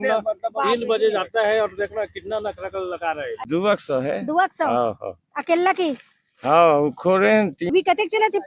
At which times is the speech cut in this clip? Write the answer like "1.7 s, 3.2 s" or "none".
3.3 s, 7.7 s